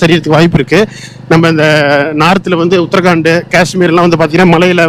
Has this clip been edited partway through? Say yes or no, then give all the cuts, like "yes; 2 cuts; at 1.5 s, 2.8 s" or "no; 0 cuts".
no; 0 cuts